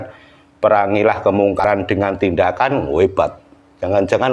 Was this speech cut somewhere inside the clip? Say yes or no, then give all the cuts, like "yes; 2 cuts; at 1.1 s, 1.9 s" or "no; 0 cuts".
yes; 1 cut; at 1.6 s